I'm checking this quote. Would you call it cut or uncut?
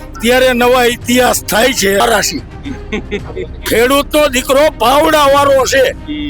cut